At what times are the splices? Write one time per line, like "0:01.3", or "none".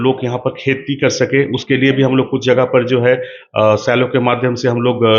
none